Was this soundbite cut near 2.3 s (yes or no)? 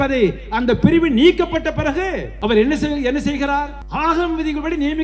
yes